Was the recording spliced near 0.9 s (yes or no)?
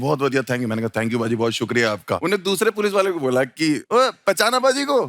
no